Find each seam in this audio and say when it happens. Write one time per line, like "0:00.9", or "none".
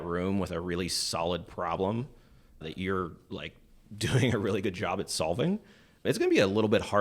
0:02.6
0:06.0